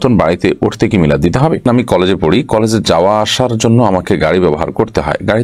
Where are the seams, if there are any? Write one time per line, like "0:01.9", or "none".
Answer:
0:01.6